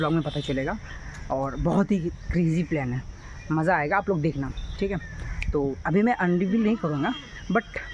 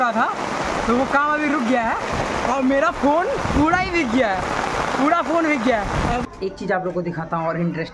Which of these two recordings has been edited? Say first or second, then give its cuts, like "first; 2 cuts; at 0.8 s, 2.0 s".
second; 1 cut; at 6.2 s